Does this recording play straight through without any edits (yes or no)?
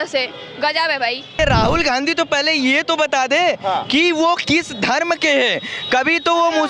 no